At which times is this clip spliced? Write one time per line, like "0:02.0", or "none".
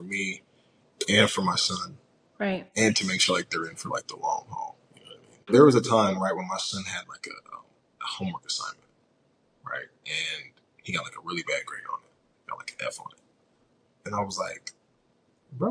0:05.5